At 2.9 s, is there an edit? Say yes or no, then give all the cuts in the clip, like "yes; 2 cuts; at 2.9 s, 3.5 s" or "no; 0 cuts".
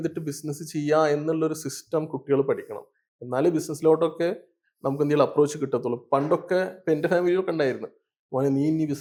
no; 0 cuts